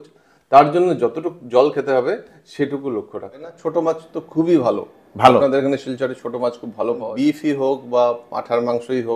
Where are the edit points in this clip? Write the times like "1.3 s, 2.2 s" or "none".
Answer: 3.6 s, 7.1 s